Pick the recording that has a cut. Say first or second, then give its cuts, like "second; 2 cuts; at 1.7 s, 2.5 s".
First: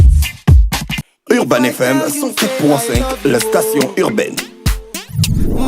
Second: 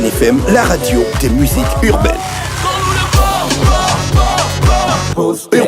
first; 1 cut; at 1.0 s